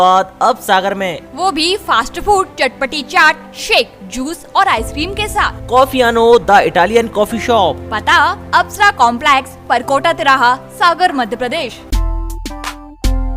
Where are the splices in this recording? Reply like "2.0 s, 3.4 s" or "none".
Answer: 11.8 s

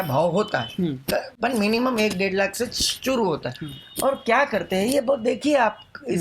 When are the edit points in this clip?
none

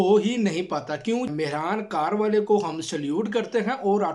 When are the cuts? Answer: 1.3 s

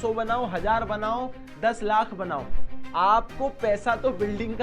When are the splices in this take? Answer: none

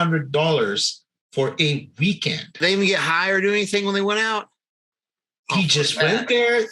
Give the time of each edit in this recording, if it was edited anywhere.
2.6 s

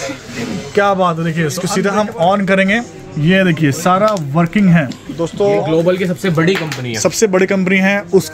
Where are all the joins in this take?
1.6 s, 5.3 s

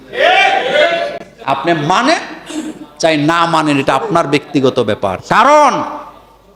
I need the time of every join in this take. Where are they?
none

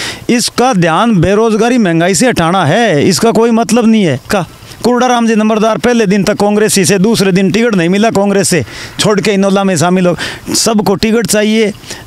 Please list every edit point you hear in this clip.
4.3 s

